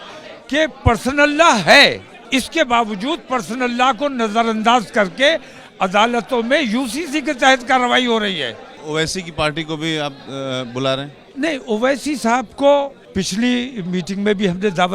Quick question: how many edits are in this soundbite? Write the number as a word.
three